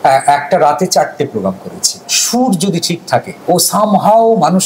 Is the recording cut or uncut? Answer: cut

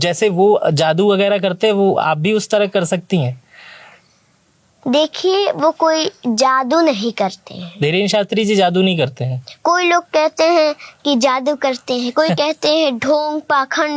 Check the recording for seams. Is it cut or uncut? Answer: uncut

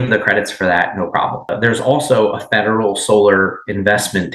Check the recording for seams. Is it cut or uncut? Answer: cut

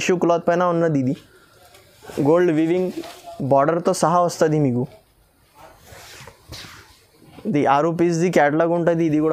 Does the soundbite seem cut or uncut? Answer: uncut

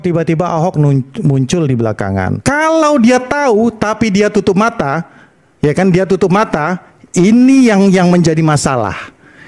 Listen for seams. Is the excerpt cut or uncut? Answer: cut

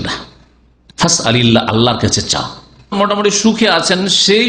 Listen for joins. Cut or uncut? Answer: cut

